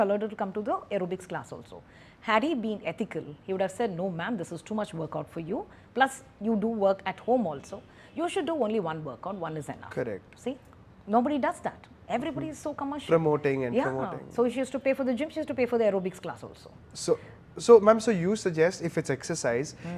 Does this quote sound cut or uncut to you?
uncut